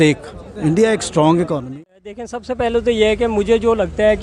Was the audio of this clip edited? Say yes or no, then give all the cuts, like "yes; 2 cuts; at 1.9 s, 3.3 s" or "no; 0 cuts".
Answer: yes; 1 cut; at 1.6 s